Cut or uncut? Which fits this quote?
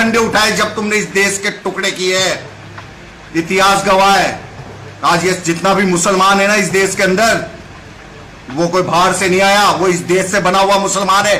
uncut